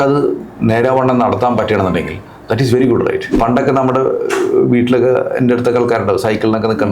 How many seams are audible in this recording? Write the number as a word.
one